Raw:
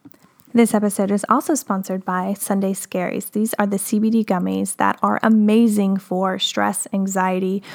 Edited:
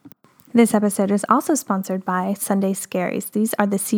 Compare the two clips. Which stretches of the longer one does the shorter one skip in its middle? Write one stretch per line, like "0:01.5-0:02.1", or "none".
none